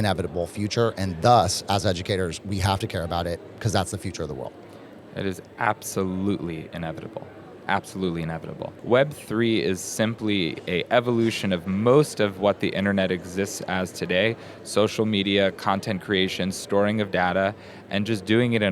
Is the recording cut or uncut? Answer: cut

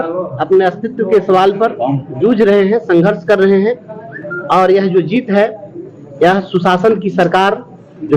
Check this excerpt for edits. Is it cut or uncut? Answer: uncut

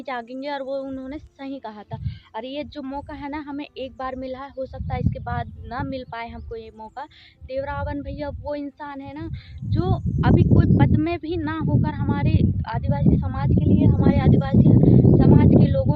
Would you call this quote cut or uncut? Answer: uncut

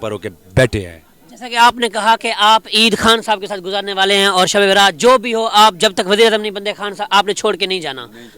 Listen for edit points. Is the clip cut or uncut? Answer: uncut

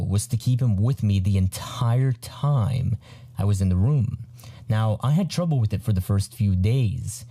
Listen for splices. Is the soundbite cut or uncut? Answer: uncut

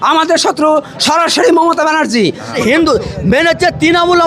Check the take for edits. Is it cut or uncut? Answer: cut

